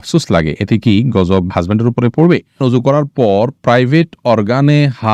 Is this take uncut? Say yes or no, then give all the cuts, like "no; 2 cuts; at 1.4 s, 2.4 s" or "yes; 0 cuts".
no; 1 cut; at 2.6 s